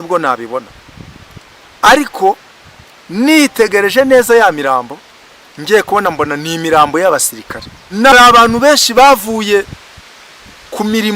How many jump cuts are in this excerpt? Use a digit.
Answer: 1